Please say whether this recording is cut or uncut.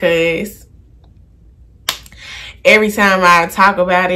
uncut